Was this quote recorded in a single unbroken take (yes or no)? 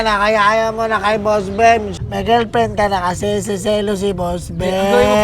no